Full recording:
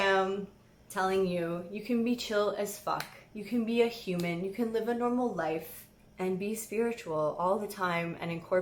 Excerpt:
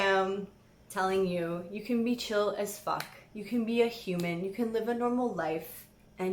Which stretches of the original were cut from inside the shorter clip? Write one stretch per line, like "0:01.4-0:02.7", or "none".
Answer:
none

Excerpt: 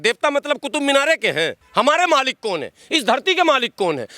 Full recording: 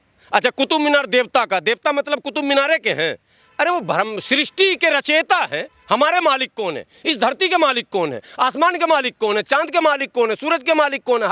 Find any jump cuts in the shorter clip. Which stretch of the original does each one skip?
0:03.2-0:05.7

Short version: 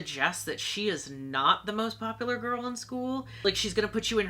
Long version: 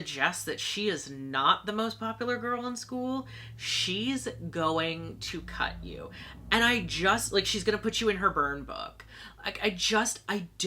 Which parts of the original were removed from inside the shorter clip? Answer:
0:03.4-0:07.3

